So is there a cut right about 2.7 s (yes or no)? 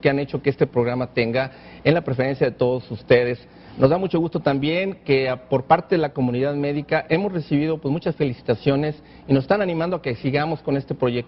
yes